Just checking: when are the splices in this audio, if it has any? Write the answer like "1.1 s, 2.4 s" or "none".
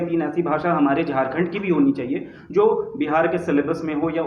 none

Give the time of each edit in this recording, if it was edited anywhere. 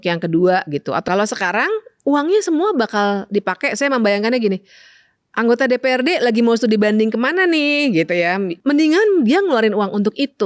1.1 s, 8.5 s

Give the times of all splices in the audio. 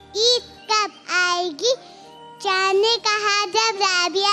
none

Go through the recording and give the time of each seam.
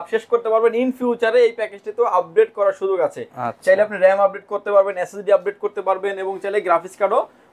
none

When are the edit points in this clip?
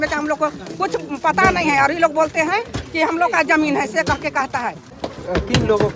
4.8 s

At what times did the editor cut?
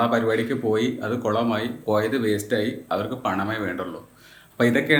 none

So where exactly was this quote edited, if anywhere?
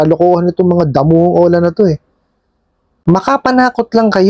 3.0 s

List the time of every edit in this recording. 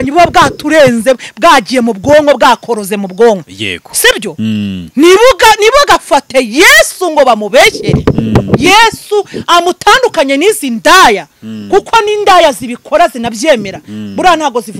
none

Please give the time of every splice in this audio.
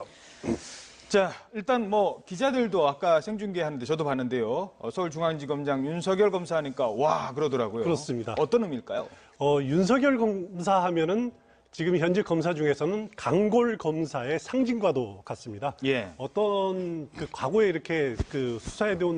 3.8 s

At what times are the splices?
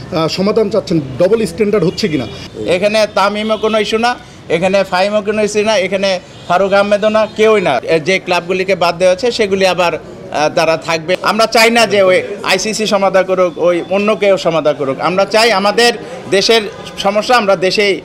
2.4 s, 7.8 s, 11.1 s

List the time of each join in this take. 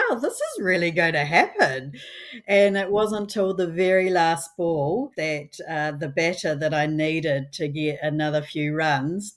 none

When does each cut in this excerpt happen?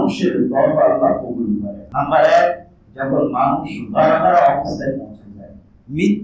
none

